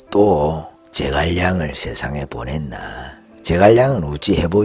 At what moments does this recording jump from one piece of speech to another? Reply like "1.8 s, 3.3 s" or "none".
none